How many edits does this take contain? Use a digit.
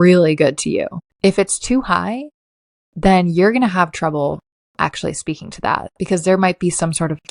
1